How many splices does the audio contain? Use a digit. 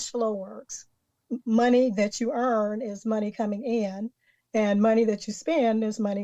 1